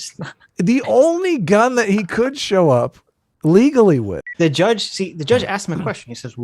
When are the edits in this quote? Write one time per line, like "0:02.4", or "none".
0:04.2

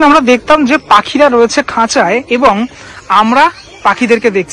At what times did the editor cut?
none

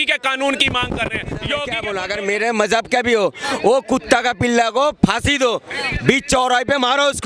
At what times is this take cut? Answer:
0:01.9

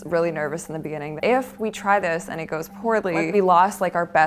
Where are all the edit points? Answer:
0:01.2
0:03.3

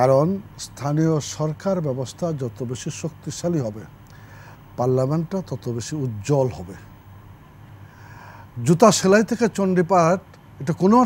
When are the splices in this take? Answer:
none

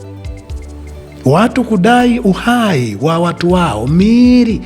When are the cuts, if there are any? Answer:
0:01.2

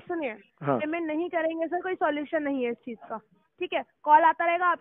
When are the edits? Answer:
none

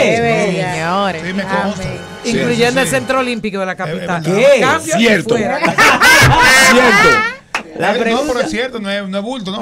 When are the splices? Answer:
none

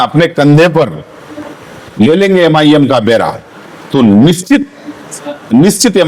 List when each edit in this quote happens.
none

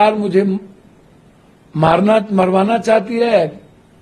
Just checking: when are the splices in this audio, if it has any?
none

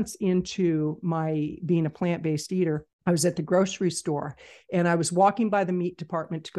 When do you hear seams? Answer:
0:02.9

